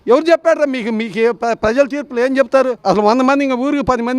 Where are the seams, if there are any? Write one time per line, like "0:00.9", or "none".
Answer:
0:02.8